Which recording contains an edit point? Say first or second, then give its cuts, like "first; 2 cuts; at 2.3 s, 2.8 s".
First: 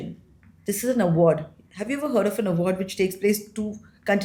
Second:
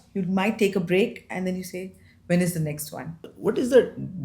second; 1 cut; at 3.3 s